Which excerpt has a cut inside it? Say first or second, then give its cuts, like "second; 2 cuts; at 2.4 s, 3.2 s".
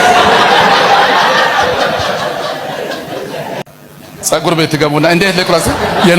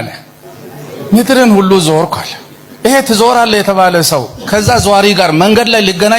first; 1 cut; at 3.7 s